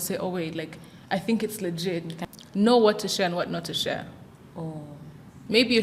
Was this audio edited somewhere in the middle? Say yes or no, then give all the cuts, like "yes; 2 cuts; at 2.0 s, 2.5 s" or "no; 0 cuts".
yes; 1 cut; at 2.1 s